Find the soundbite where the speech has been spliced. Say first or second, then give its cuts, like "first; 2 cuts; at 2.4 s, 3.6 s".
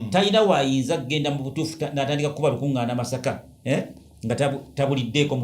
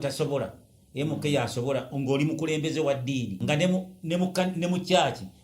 second; 1 cut; at 3.4 s